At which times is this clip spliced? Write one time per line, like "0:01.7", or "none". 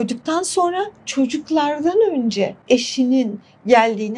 0:02.6